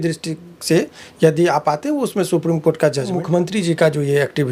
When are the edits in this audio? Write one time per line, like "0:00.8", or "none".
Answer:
0:03.2